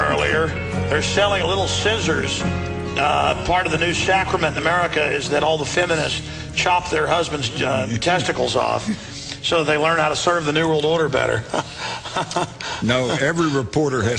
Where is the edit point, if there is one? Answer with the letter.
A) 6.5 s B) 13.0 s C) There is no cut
B